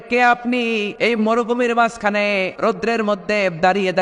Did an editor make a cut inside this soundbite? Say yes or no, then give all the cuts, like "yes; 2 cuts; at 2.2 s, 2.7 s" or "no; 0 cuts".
yes; 2 cuts; at 0.9 s, 2.5 s